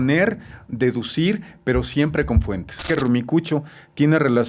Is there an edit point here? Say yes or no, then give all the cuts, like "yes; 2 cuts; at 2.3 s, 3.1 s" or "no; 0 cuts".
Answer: yes; 1 cut; at 2.9 s